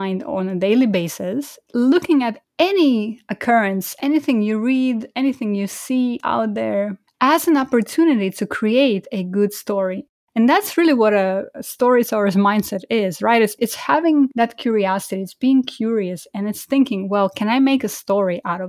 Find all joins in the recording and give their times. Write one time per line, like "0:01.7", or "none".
0:02.4